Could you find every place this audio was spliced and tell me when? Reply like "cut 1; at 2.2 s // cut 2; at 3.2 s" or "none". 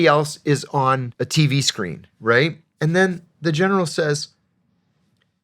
cut 1; at 1.1 s // cut 2; at 2.7 s